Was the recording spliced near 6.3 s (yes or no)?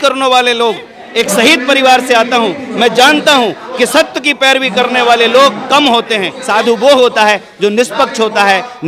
yes